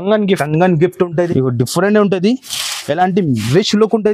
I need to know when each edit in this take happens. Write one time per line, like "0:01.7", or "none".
0:01.3